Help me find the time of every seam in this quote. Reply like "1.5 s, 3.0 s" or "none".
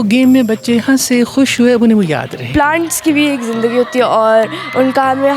2.4 s